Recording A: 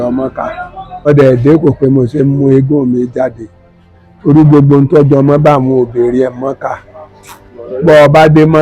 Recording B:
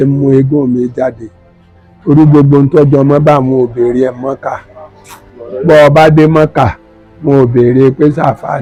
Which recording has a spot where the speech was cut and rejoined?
A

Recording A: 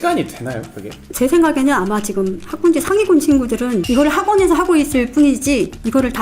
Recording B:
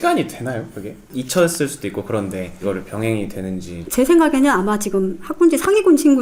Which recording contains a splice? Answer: A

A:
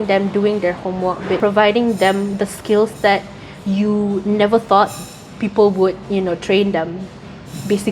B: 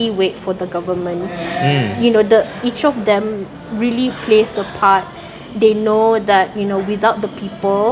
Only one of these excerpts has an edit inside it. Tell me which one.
A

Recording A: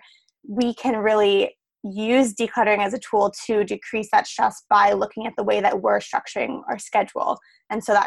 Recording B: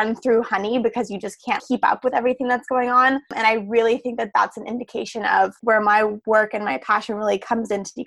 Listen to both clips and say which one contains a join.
B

